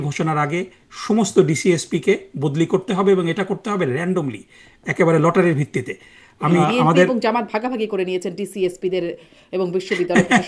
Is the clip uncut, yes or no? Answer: no